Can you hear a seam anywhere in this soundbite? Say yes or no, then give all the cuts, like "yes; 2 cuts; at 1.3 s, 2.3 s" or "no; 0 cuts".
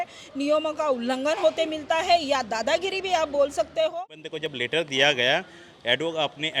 yes; 1 cut; at 3.9 s